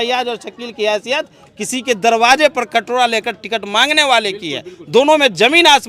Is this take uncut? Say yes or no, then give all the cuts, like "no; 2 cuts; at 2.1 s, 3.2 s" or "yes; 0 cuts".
yes; 0 cuts